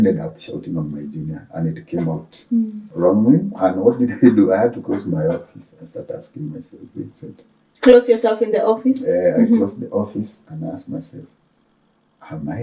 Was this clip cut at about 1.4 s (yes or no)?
no